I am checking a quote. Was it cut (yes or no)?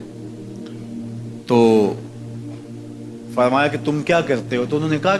yes